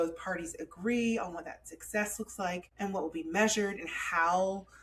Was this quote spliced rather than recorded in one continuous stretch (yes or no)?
yes